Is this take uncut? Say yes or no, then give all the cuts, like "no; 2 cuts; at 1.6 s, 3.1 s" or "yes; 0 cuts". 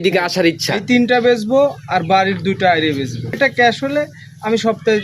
no; 1 cut; at 3.4 s